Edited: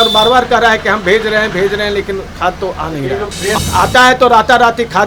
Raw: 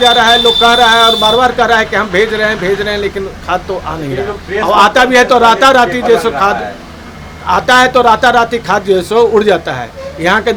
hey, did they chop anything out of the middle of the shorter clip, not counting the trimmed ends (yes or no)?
yes